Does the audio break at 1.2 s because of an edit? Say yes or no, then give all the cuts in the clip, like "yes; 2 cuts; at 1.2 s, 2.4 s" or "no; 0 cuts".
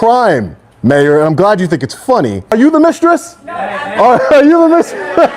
no; 1 cut; at 2.5 s